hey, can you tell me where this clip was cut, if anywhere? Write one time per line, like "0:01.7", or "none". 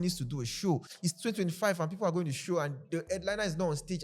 0:00.9